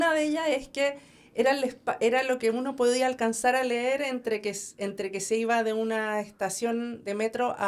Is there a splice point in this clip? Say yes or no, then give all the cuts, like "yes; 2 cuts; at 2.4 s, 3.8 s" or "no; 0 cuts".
no; 0 cuts